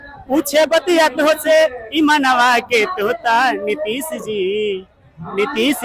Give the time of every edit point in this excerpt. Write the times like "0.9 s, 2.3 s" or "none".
none